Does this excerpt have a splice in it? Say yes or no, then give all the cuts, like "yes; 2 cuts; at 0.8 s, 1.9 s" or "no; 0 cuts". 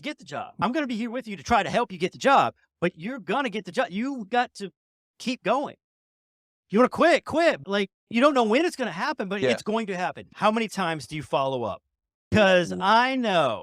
yes; 2 cuts; at 10.2 s, 12.3 s